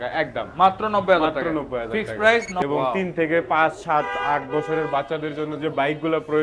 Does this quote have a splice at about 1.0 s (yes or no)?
no